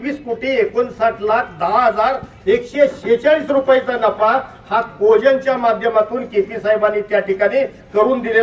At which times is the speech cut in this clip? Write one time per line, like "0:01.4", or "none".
none